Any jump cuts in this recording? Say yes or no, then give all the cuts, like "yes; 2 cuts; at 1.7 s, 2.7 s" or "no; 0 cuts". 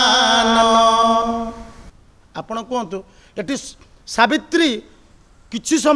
yes; 1 cut; at 1.7 s